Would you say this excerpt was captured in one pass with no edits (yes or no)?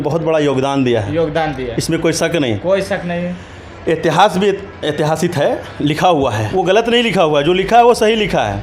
no